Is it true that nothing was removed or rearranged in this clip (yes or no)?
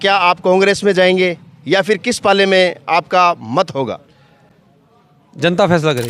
yes